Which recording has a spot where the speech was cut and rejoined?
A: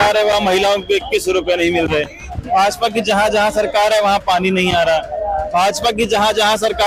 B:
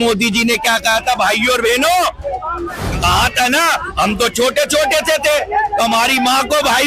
B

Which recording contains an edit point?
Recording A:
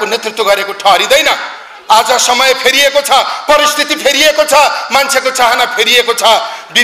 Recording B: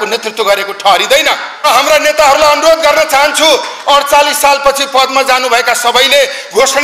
B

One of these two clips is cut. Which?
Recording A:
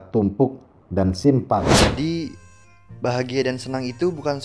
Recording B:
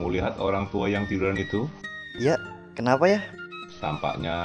A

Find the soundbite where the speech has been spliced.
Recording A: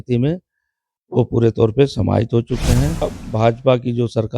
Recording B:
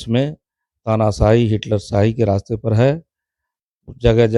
A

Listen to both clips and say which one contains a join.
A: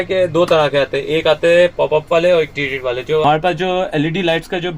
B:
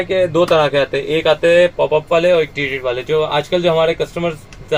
A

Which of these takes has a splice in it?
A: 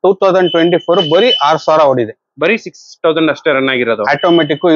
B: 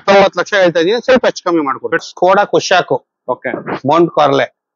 B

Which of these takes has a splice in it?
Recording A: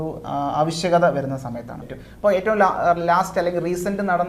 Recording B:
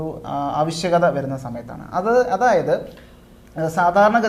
A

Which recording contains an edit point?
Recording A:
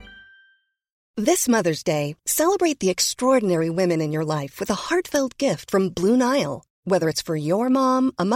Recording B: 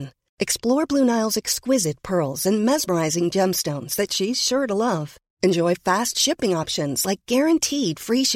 A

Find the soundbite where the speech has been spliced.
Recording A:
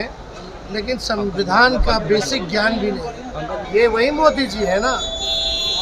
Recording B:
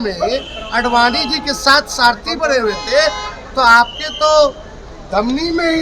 A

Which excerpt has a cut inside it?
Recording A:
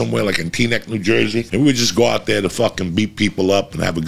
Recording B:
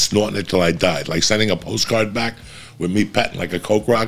A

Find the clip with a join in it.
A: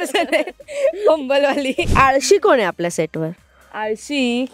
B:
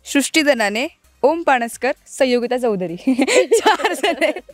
A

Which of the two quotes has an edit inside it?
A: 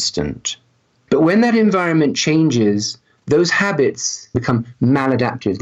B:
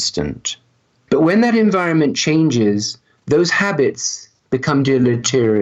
A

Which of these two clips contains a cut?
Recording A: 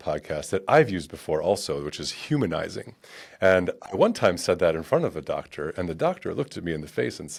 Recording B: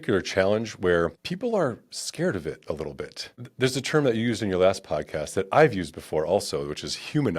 B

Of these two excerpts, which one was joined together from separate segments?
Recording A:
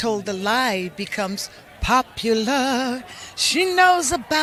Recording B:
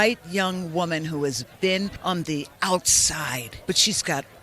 B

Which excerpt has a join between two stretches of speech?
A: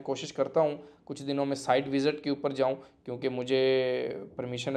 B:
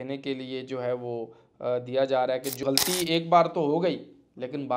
B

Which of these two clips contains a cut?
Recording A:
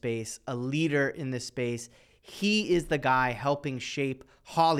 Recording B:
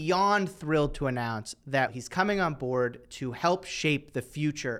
B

